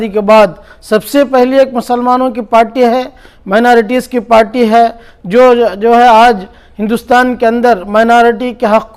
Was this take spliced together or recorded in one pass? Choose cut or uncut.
uncut